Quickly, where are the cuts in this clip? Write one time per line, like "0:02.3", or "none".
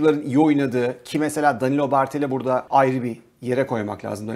0:02.7